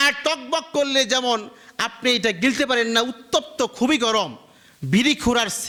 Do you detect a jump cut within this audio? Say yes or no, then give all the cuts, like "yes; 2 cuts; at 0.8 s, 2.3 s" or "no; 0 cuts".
no; 0 cuts